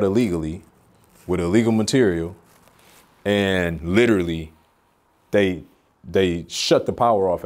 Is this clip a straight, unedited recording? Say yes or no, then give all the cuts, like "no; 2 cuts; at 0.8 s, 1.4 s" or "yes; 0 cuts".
yes; 0 cuts